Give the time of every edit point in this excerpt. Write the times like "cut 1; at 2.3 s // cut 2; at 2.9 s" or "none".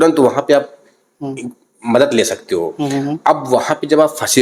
none